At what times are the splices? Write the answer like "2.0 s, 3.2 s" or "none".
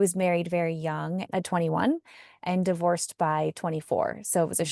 1.3 s